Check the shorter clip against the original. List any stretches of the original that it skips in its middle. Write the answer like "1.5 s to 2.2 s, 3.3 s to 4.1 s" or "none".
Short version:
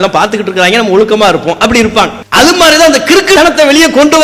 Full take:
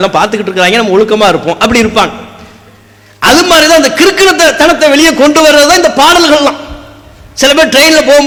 2.2 s to 3.1 s, 4.3 s to 4.6 s